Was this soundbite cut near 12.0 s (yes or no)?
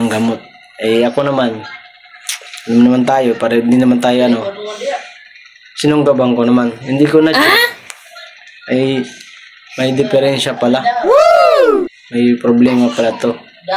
yes